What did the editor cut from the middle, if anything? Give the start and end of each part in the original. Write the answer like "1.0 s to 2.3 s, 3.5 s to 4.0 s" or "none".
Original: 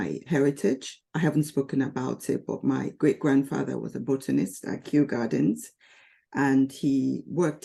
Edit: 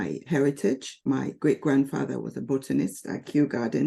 0.9 s to 2.5 s